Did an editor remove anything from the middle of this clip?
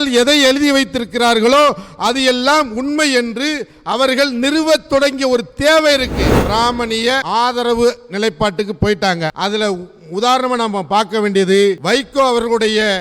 yes; 1 cut; at 6.3 s

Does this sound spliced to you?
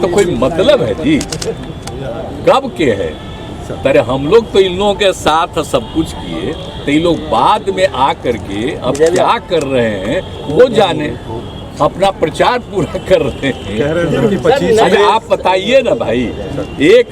no; 0 cuts

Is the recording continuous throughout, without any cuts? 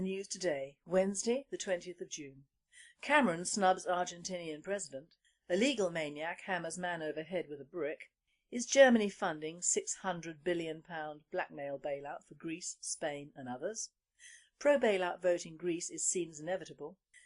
no; 1 cut; at 4.0 s

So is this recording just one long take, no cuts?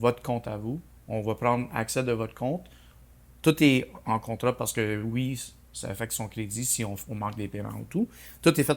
yes; 0 cuts

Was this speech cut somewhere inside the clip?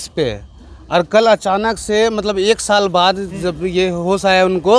no; 0 cuts

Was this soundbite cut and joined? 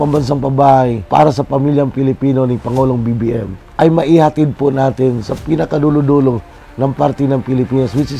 yes; 2 cuts; at 1.0 s, 3.6 s

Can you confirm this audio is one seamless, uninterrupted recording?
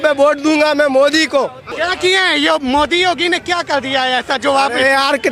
no; 1 cut; at 1.6 s

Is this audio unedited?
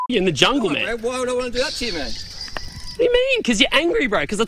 yes; 0 cuts

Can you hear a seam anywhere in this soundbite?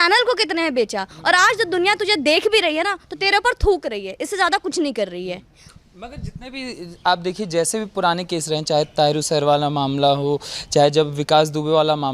no; 0 cuts

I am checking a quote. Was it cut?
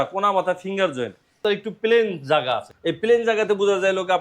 yes; 2 cuts; at 1.4 s, 2.7 s

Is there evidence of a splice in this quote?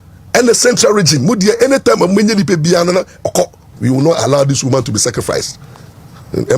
yes; 1 cut; at 3.6 s

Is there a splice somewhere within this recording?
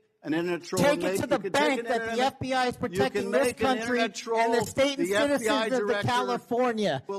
no; 0 cuts

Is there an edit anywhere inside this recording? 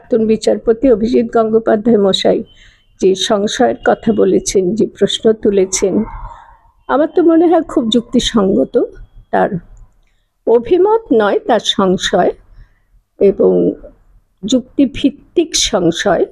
no; 0 cuts

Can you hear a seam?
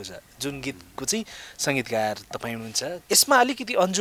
yes; 1 cut; at 3.0 s

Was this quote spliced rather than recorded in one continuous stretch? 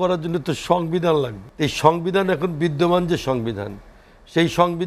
yes; 1 cut; at 1.4 s

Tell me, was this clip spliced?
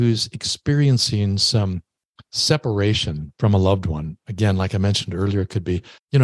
no; 0 cuts

